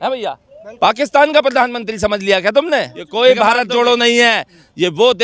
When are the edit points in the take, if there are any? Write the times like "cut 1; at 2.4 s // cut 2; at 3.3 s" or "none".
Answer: cut 1; at 3.0 s